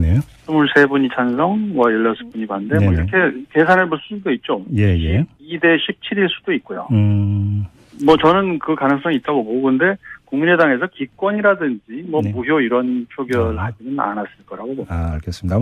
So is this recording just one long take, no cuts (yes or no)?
yes